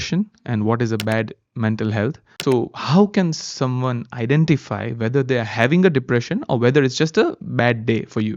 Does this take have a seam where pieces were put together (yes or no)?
yes